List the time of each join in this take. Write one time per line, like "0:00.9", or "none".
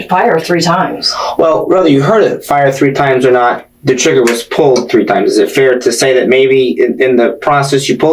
0:00.9